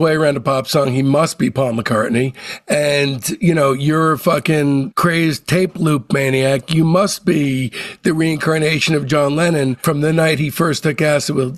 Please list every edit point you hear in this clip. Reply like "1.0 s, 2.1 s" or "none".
none